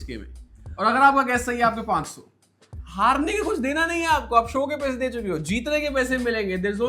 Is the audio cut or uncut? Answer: uncut